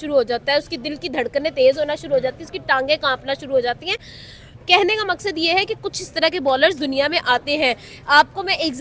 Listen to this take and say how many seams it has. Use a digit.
0